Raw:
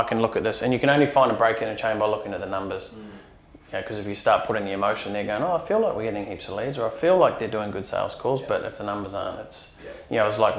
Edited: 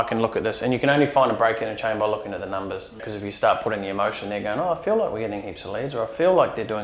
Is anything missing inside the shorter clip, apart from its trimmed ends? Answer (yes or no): yes